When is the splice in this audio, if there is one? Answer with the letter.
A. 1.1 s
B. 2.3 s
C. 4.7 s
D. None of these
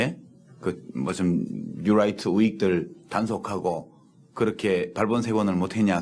B